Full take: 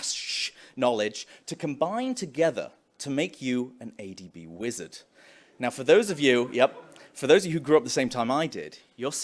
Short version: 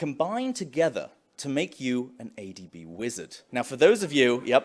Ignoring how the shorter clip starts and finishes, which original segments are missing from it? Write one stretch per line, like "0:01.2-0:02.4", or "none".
0:05.0-0:05.4